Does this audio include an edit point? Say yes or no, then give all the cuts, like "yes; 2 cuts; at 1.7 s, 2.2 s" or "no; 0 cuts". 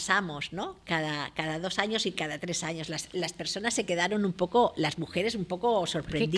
no; 0 cuts